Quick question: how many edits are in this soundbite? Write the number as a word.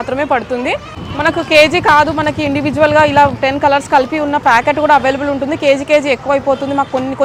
zero